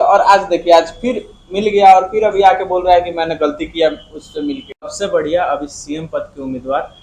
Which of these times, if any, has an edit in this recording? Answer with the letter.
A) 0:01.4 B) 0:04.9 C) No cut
B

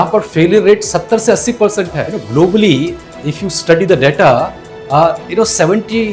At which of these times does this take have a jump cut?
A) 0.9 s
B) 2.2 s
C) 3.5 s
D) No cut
B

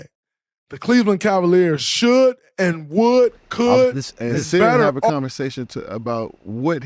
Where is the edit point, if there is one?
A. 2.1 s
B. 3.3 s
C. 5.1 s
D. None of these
C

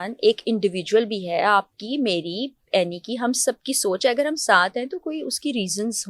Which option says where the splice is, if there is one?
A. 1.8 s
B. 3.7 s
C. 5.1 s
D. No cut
D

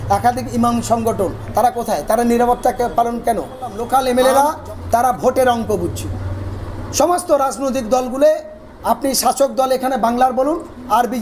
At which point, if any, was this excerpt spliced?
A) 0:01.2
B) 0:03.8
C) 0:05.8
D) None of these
B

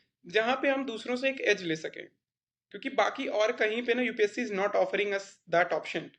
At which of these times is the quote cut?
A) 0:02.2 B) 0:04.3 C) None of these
C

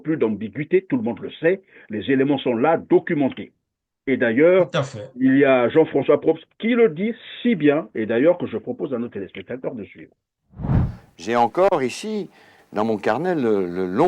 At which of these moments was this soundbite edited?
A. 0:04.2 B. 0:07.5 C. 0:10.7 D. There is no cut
C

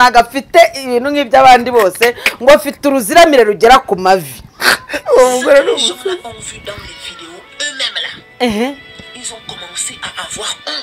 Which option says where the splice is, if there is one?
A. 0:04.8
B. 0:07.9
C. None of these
C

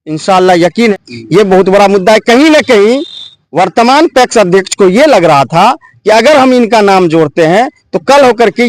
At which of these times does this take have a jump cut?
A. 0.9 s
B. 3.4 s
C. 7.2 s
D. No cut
A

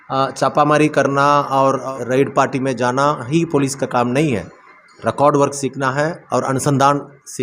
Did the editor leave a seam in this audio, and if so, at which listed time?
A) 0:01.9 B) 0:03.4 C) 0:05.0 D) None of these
A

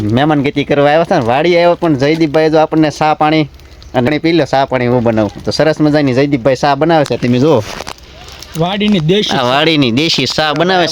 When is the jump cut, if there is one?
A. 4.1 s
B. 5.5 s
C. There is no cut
A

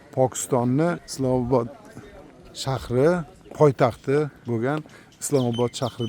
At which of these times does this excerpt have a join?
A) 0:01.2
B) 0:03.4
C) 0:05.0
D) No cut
D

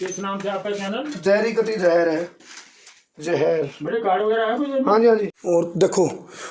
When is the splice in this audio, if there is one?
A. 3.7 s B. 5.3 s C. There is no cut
B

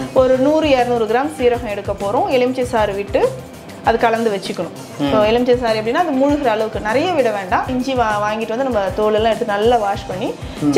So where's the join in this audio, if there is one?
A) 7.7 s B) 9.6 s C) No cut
A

